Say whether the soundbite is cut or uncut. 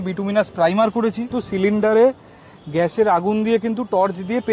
cut